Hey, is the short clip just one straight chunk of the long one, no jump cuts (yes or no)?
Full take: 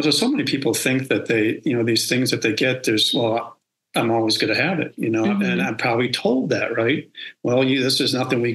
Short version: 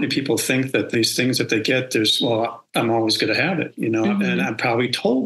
no